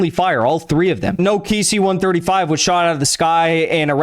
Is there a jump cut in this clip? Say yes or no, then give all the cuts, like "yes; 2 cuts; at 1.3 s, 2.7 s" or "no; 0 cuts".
yes; 1 cut; at 1.2 s